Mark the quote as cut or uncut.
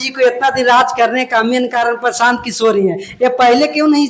uncut